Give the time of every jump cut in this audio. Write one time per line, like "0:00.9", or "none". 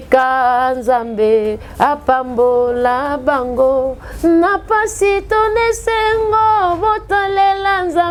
none